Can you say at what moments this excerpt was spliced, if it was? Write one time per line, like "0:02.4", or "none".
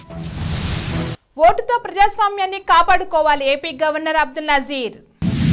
none